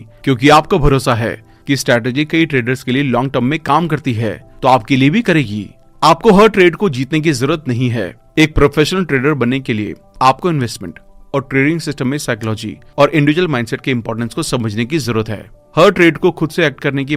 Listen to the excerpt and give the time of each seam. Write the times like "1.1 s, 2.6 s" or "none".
none